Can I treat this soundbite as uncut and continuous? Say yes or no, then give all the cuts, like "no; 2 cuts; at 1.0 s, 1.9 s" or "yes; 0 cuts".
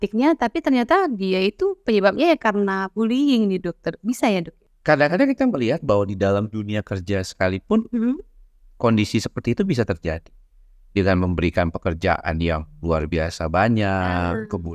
no; 1 cut; at 4.5 s